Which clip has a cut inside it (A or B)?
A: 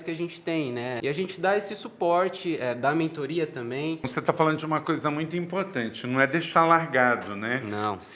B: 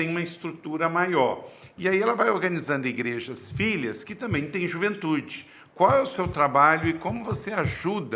A